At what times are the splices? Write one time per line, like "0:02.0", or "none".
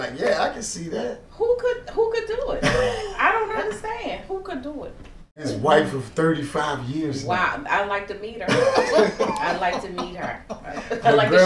0:05.4